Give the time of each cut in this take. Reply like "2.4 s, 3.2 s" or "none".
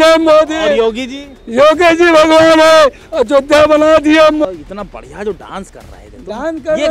4.4 s